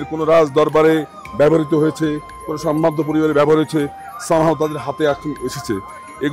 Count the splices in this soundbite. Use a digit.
0